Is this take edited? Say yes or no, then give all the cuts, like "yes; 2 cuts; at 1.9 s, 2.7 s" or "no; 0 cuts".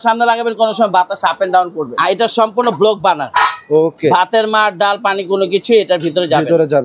no; 0 cuts